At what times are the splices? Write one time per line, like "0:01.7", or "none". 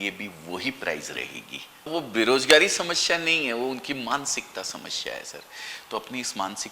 0:01.9